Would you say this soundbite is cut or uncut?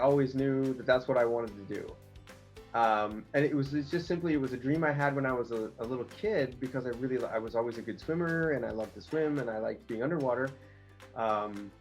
uncut